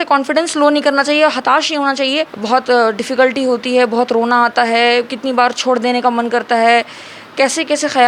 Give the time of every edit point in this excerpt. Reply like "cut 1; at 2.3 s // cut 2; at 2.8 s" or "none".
cut 1; at 2.3 s